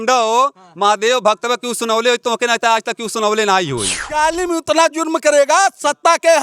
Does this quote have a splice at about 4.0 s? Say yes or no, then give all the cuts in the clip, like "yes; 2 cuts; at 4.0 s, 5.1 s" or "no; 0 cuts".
yes; 1 cut; at 4.0 s